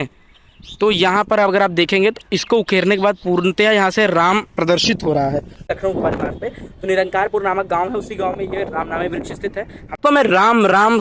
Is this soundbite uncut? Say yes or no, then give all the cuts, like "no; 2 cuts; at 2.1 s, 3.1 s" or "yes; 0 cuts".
no; 2 cuts; at 5.8 s, 10.0 s